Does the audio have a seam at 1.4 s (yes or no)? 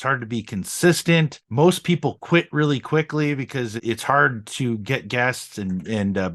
yes